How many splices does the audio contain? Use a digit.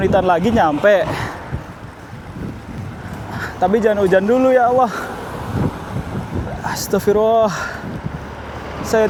0